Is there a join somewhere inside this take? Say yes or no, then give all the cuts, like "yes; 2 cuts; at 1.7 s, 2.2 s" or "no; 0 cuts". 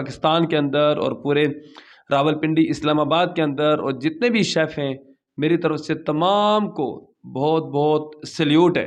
no; 0 cuts